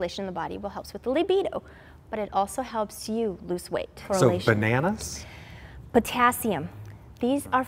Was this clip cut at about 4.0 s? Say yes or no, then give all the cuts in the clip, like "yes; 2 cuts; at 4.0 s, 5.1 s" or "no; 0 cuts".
yes; 1 cut; at 4.0 s